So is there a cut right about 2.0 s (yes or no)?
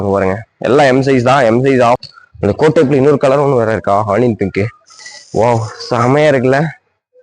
yes